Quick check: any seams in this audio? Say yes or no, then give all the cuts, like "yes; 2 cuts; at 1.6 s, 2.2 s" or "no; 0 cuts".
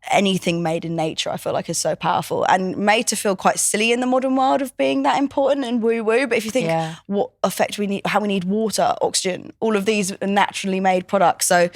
no; 0 cuts